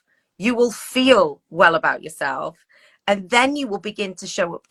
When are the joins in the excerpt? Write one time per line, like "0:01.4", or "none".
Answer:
none

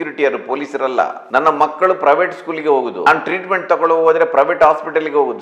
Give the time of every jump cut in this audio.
none

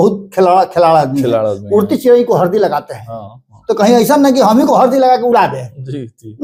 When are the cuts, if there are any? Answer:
none

